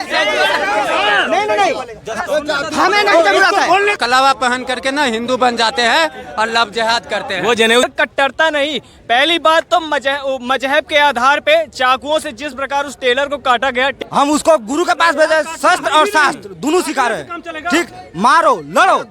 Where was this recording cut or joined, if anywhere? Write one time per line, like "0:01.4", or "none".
0:04.0
0:07.8
0:13.9